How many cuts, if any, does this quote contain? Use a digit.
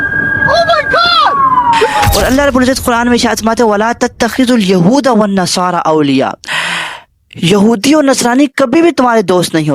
1